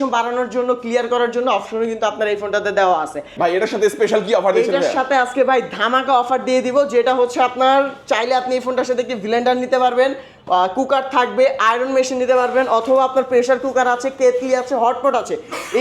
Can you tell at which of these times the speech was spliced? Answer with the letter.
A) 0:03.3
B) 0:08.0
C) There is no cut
A